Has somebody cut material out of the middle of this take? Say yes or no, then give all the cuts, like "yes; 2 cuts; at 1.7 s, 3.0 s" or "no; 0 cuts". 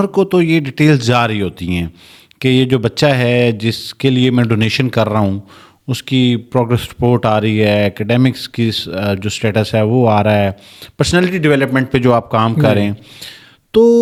no; 0 cuts